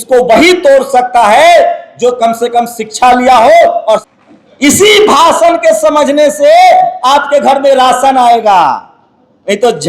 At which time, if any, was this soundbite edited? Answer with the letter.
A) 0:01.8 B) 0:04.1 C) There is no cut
B